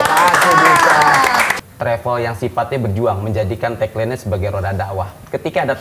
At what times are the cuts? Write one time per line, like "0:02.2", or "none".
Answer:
0:01.5